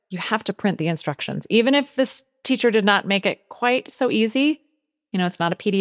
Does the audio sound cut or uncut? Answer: uncut